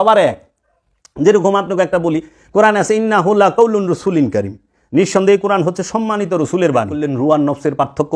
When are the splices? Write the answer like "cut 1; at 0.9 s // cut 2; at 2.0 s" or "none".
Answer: cut 1; at 7.2 s